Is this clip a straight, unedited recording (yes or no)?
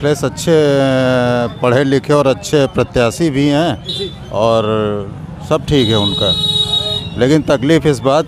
yes